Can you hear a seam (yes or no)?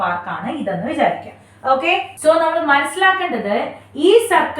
no